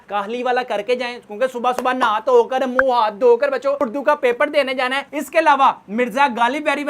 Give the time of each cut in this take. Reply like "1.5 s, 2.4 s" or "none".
none